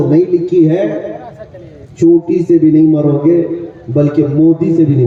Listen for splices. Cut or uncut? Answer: uncut